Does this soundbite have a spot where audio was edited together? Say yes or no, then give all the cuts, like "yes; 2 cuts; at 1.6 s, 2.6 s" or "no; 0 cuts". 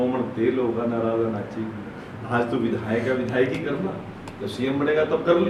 no; 0 cuts